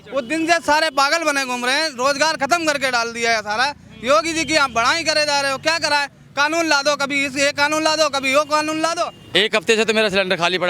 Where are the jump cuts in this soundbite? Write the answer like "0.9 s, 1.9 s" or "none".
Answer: 9.1 s